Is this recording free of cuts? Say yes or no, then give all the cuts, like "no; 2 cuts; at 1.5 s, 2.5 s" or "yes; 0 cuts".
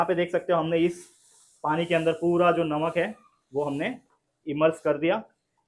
yes; 0 cuts